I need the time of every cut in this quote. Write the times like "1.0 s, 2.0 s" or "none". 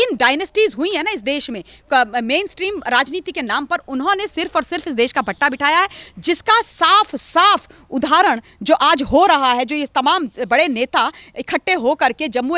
none